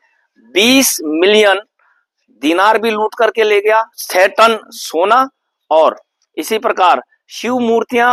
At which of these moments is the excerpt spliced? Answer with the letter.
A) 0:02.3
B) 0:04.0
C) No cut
B